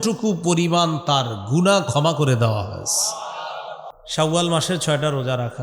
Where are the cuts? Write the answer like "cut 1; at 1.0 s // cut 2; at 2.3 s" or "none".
cut 1; at 4.0 s